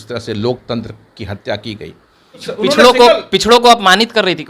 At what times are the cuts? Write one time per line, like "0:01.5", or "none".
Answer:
0:02.5